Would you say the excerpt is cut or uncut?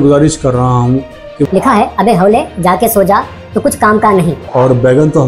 cut